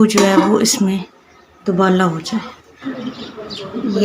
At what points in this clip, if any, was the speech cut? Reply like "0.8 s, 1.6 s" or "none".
2.9 s